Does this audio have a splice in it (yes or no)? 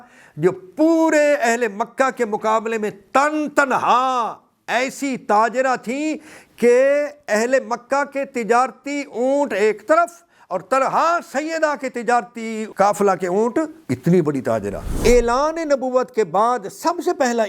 yes